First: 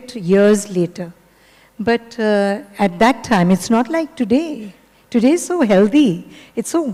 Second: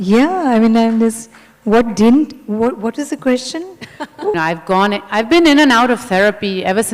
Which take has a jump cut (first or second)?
second